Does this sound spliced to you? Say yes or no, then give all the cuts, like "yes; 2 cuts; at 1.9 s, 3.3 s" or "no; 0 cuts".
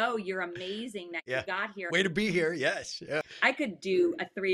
yes; 1 cut; at 3.3 s